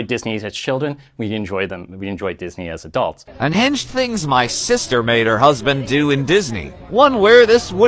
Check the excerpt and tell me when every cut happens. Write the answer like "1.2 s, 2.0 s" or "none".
3.3 s